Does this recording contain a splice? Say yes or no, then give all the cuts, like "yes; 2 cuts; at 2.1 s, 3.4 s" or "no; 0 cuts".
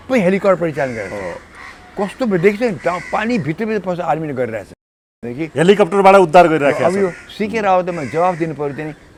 no; 0 cuts